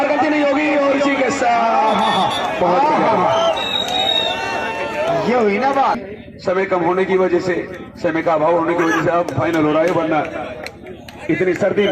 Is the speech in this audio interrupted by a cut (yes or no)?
yes